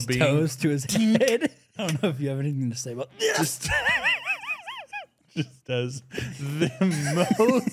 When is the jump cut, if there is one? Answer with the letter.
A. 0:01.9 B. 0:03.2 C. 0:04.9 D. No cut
A